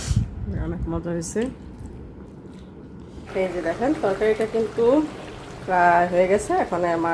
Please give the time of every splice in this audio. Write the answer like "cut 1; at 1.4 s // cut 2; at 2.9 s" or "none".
cut 1; at 3.2 s